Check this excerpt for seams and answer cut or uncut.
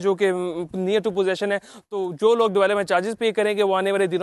uncut